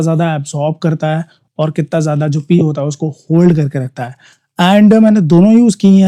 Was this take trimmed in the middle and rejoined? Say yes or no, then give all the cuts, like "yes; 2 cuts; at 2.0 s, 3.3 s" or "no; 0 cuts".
no; 0 cuts